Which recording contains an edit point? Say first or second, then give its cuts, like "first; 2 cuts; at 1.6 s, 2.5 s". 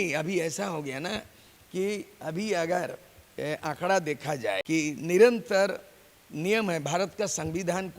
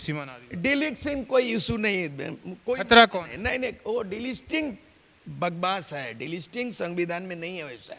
first; 1 cut; at 4.6 s